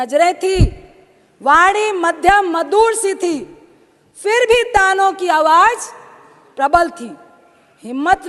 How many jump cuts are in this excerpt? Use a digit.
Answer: 0